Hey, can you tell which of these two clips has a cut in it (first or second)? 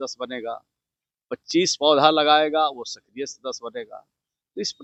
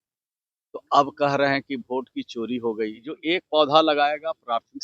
second